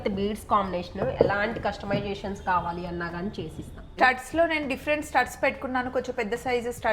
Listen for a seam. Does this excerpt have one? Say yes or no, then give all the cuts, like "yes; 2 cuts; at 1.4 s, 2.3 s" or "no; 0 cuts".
yes; 1 cut; at 3.9 s